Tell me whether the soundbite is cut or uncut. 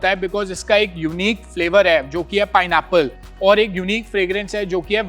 uncut